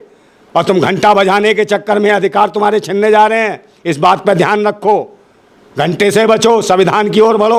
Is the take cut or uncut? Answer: uncut